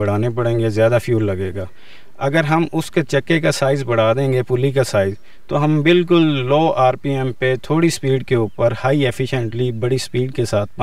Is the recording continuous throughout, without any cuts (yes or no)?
yes